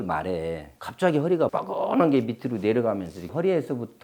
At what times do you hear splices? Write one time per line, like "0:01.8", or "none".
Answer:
0:01.5